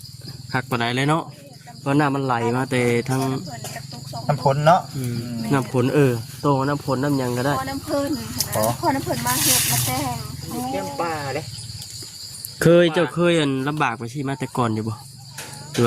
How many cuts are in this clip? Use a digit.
1